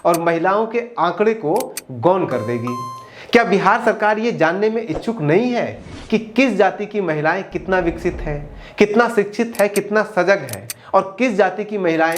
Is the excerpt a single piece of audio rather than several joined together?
yes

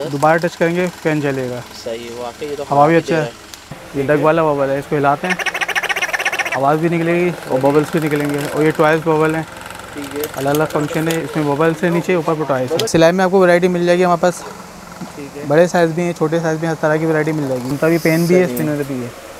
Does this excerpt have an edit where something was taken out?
yes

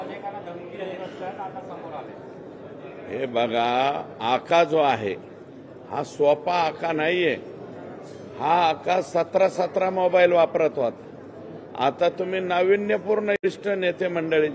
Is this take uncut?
no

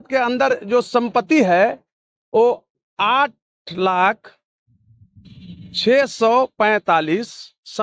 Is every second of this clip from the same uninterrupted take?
yes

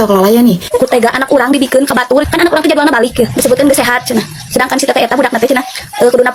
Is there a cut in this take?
no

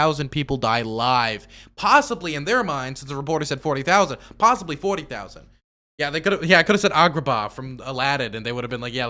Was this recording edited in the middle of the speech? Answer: no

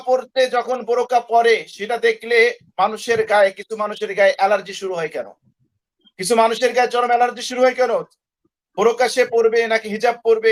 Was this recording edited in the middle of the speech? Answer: no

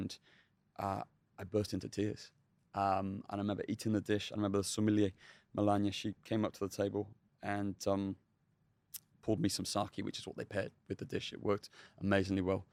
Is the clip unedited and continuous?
yes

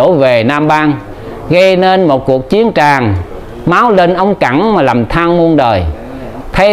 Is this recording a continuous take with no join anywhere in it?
yes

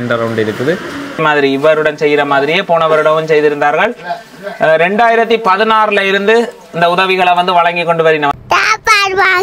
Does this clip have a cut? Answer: yes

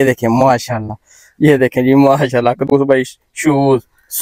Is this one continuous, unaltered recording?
yes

